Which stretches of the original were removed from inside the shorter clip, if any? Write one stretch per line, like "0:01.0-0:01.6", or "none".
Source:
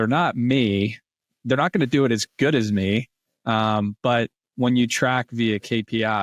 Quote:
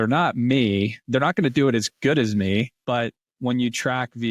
0:01.0-0:01.3
0:03.1-0:03.9